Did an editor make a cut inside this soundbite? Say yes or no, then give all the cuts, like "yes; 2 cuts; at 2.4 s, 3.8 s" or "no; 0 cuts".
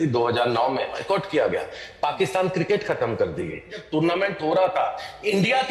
yes; 2 cuts; at 1.0 s, 3.8 s